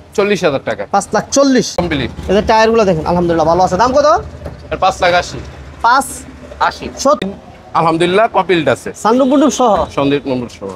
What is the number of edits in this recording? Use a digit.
2